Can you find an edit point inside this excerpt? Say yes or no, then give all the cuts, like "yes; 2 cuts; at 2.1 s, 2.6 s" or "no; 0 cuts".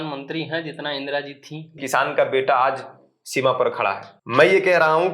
yes; 2 cuts; at 1.8 s, 4.1 s